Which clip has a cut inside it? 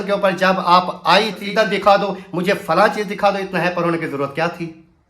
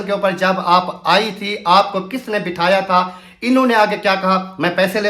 first; 1 cut; at 1.4 s

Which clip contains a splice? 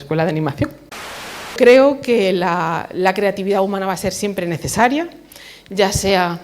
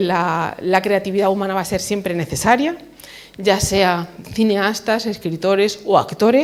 first; 1 cut; at 1.4 s

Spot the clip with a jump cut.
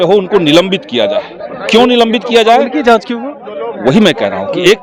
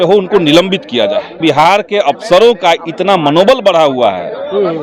second; 1 cut; at 1.3 s

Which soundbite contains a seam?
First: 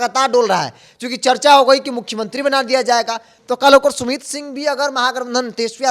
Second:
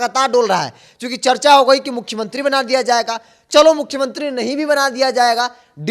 first; 1 cut; at 3.3 s

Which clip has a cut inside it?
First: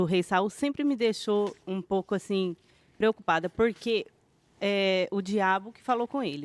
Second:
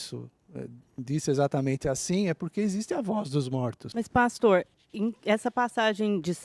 second; 1 cut; at 3.8 s

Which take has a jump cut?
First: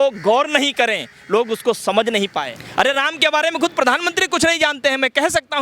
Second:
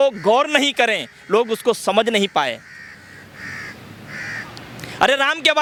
first; 1 cut; at 2.6 s

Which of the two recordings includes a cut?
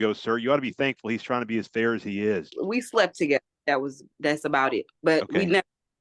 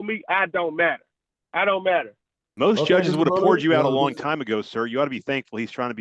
first; 2 cuts; at 2.5 s, 4.9 s

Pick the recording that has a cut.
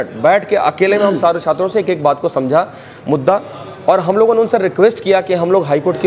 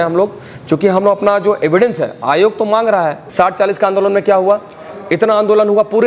second; 1 cut; at 3.2 s

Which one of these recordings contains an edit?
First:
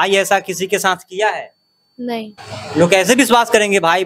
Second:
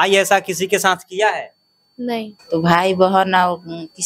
second; 1 cut; at 2.4 s

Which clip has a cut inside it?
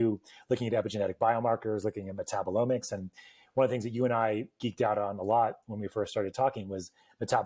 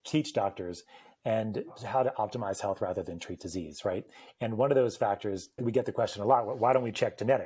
second; 2 cuts; at 1.8 s, 5.6 s

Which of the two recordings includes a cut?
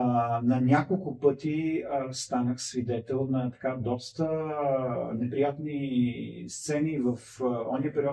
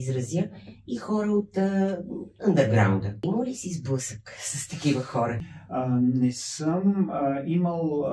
second; 2 cuts; at 3.2 s, 5.4 s

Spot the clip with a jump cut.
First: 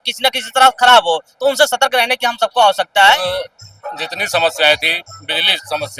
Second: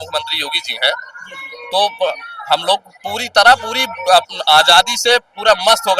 first; 1 cut; at 3.2 s

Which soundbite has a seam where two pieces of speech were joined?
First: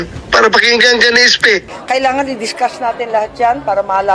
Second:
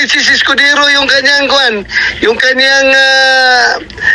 first; 1 cut; at 1.7 s

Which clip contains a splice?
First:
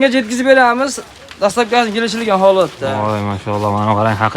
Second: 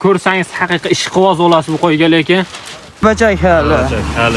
second; 1 cut; at 3.0 s

